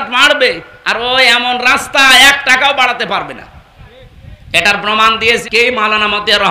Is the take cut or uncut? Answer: cut